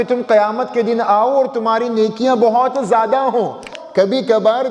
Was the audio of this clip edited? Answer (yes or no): yes